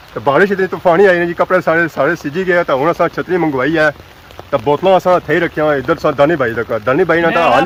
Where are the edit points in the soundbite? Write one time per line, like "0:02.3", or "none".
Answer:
none